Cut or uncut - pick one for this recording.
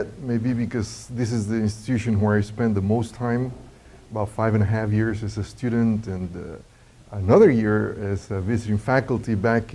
cut